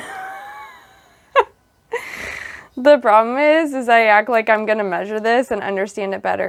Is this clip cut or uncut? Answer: uncut